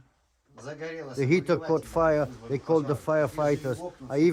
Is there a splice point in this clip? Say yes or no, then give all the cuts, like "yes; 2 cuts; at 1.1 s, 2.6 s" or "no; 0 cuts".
no; 0 cuts